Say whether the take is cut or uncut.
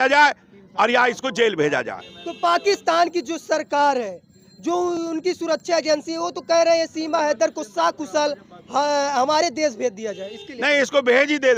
uncut